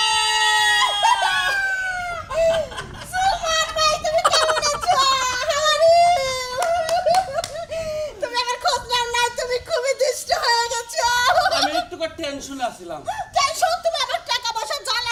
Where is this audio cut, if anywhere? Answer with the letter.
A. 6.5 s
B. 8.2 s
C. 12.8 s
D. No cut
D